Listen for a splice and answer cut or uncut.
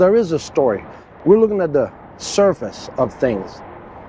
cut